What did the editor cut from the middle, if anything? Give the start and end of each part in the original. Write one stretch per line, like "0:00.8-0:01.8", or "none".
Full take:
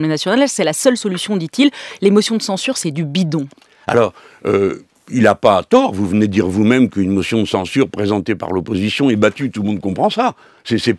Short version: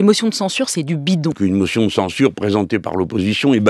0:03.4-0:06.9